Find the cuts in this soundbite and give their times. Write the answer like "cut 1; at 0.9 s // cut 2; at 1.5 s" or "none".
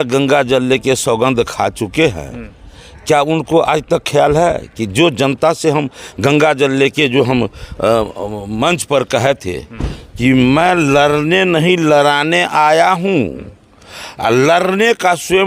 none